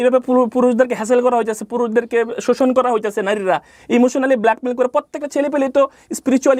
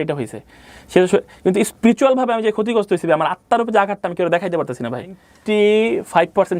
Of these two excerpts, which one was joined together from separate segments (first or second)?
second